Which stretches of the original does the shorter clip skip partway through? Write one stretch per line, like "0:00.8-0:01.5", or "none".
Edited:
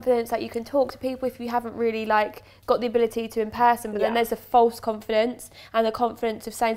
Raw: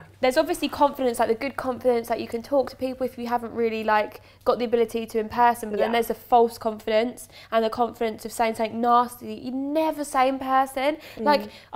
none